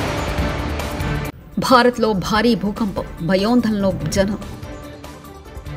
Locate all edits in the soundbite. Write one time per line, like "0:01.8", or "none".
0:01.3